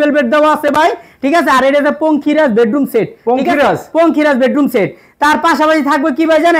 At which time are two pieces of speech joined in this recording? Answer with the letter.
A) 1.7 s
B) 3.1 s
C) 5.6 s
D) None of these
D